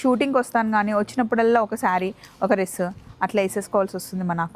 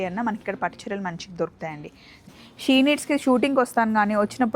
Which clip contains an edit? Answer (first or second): second